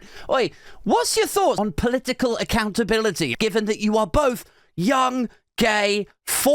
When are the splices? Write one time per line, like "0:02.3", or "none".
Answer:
0:01.6
0:03.3